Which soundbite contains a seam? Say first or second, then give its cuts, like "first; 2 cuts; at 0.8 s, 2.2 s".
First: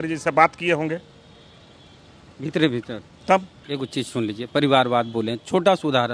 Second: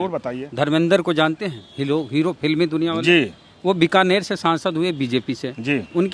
first; 1 cut; at 3.6 s